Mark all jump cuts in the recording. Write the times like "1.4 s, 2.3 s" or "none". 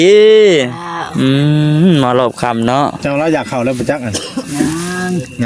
none